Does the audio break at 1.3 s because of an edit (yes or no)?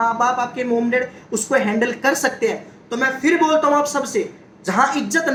no